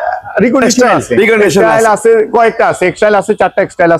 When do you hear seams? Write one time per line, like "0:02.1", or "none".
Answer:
0:01.6